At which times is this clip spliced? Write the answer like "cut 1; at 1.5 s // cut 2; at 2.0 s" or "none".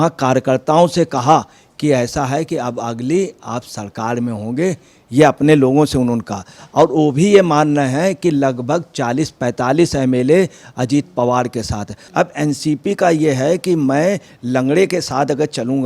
cut 1; at 11.9 s